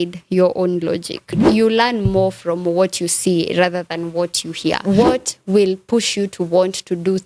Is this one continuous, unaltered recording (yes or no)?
no